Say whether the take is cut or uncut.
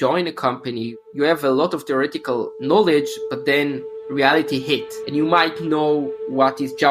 cut